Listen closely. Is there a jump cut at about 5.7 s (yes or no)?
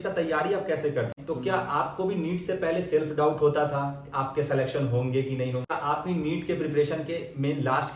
yes